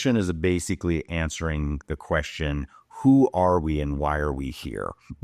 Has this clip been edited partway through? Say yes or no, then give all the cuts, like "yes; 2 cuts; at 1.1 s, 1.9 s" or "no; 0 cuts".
no; 0 cuts